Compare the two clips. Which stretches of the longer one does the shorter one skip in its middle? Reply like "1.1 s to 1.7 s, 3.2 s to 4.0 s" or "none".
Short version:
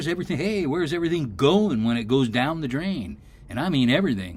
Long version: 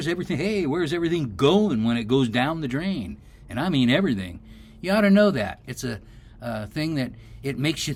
none